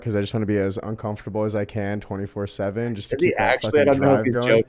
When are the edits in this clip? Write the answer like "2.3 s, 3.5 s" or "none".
none